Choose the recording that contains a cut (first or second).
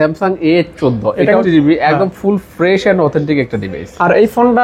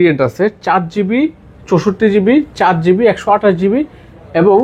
first